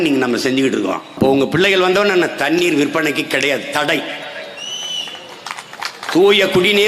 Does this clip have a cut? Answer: yes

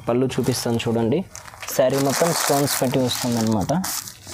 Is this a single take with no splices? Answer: yes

